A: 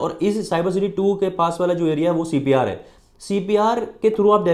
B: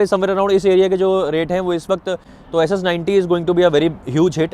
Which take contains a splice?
B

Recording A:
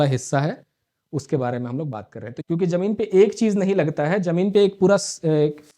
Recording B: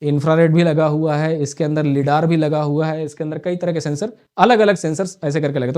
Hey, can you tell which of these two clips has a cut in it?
A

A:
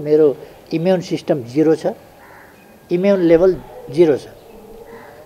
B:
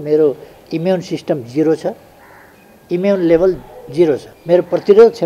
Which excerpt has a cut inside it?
B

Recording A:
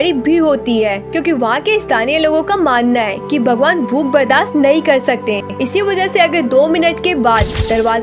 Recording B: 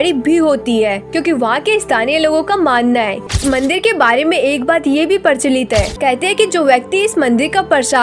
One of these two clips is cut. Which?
B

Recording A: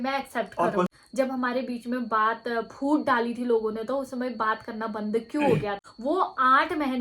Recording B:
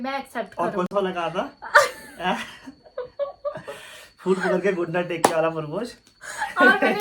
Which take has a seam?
A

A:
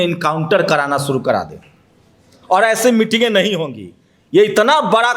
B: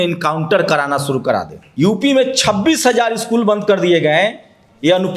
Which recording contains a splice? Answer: B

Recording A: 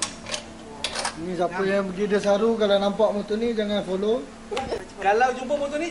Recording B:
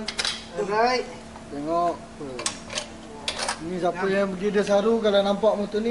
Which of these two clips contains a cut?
A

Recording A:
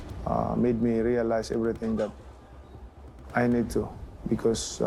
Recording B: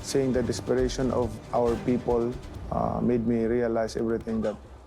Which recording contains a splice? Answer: B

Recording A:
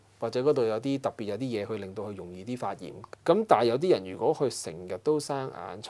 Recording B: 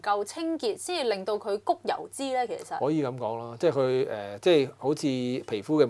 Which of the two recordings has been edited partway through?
A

